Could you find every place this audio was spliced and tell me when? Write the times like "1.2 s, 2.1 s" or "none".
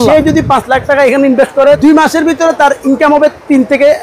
1.8 s